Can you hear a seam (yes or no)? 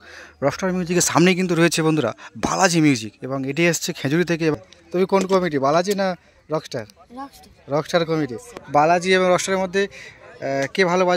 yes